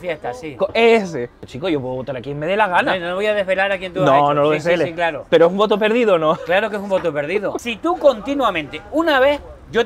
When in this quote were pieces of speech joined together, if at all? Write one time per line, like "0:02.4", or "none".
0:01.4
0:07.6